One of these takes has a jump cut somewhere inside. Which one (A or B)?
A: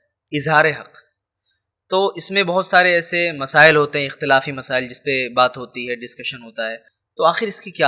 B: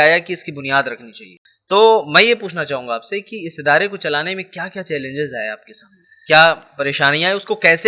B